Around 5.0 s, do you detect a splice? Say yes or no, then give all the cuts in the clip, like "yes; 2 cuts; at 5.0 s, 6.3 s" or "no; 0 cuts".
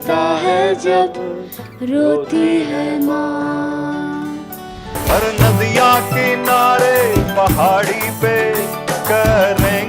yes; 1 cut; at 5.0 s